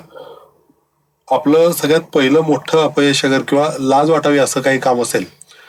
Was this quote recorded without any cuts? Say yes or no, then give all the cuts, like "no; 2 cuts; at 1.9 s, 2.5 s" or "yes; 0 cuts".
yes; 0 cuts